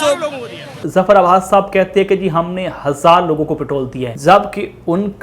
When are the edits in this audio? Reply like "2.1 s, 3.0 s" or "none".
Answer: 4.0 s